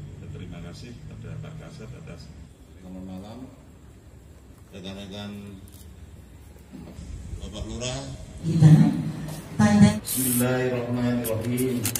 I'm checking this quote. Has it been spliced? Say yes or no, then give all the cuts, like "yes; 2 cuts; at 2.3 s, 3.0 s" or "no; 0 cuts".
yes; 1 cut; at 1.4 s